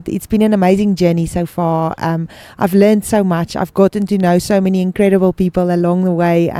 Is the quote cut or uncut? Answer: uncut